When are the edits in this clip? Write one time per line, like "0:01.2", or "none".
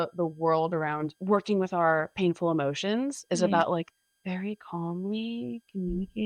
0:01.1